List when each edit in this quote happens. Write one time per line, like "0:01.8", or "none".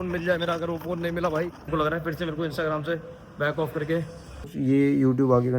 0:01.7
0:04.5